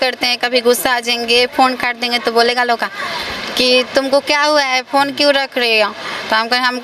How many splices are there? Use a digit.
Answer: 0